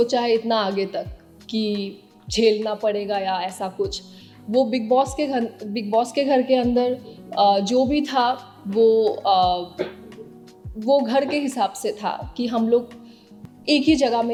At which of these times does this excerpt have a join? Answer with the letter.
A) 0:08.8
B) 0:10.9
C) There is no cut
C